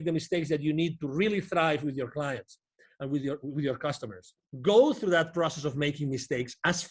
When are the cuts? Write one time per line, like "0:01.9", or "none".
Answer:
0:04.5